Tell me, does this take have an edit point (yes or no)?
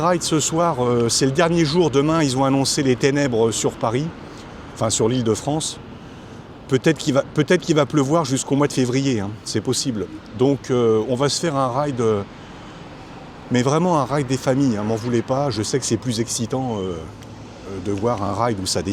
no